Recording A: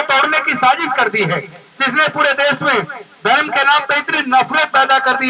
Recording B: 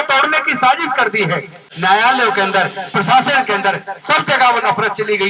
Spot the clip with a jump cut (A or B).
B